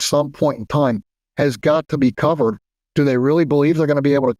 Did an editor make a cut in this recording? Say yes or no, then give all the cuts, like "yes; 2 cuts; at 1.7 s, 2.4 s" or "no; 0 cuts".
no; 0 cuts